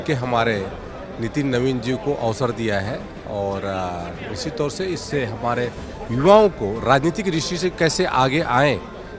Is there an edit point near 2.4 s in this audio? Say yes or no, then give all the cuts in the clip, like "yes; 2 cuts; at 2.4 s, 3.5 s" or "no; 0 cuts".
no; 0 cuts